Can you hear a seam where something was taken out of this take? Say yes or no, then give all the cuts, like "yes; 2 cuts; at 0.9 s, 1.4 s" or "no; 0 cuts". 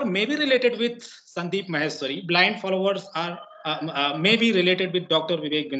no; 0 cuts